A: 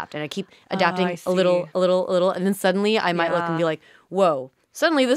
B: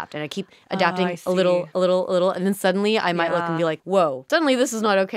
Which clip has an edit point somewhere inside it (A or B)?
B